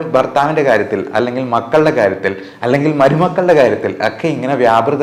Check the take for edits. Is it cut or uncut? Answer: uncut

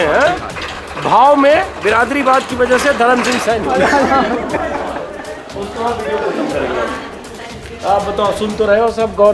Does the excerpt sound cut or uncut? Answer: cut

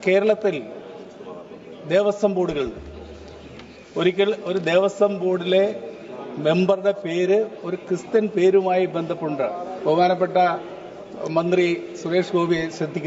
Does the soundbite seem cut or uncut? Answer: uncut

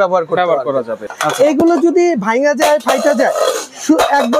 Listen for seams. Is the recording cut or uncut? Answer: cut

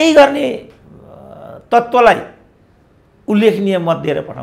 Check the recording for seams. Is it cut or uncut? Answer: uncut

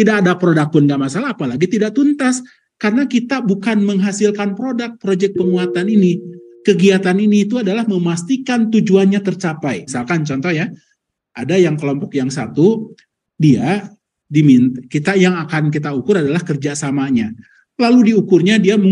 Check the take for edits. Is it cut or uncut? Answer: cut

